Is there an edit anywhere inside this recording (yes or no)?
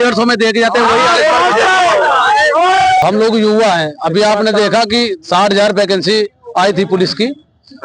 yes